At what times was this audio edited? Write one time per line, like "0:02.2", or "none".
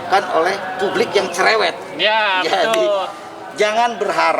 none